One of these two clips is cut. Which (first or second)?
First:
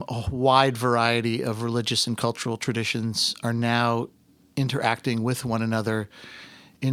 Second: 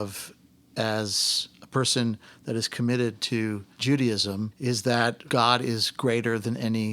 second